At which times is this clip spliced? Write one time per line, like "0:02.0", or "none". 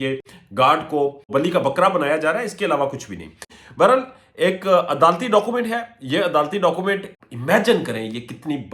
0:01.3
0:07.2